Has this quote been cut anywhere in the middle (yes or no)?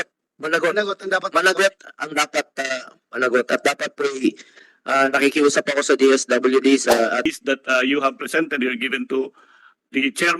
yes